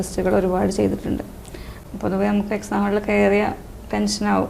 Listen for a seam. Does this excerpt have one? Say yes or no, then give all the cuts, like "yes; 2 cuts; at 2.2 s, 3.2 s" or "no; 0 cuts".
yes; 1 cut; at 1.7 s